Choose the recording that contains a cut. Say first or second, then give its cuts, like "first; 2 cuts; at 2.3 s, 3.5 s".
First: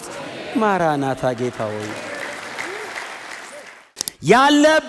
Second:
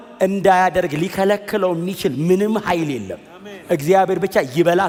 first; 1 cut; at 3.6 s